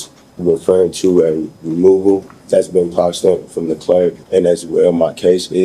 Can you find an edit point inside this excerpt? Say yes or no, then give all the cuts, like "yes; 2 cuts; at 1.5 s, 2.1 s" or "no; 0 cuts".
yes; 2 cuts; at 2.3 s, 4.2 s